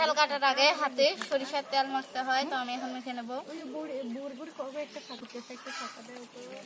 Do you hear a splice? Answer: yes; 1 cut; at 5.2 s

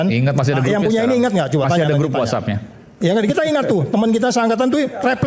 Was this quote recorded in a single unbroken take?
yes; 0 cuts

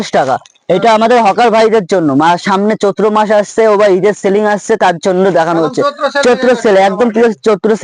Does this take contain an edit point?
no; 0 cuts

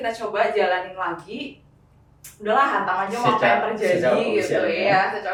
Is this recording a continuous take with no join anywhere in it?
yes; 0 cuts

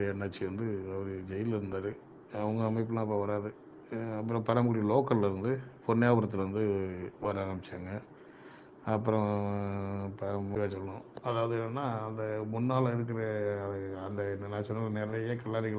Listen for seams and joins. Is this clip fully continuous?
no; 1 cut; at 10.5 s

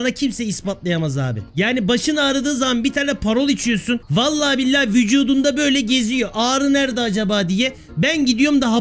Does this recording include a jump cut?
yes; 2 cuts; at 1.4 s, 4.1 s

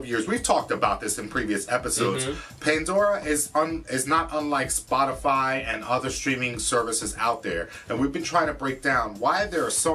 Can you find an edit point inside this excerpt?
yes; 1 cut; at 1.9 s

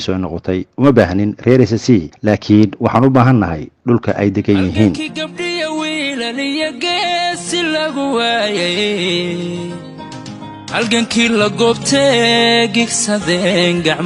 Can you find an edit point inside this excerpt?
yes; 1 cut; at 5.0 s

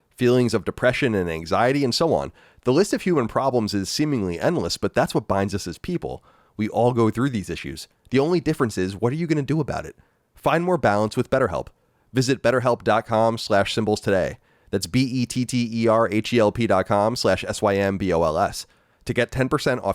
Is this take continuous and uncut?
yes; 0 cuts

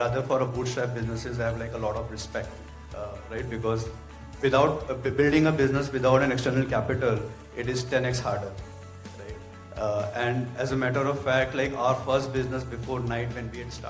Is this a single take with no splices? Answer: yes; 0 cuts

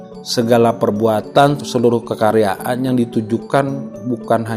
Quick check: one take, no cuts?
no; 1 cut; at 1.6 s

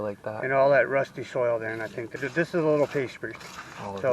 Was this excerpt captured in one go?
no; 1 cut; at 2.1 s

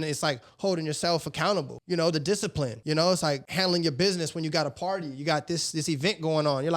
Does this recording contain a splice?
yes; 3 cuts; at 1.8 s, 2.8 s, 3.5 s

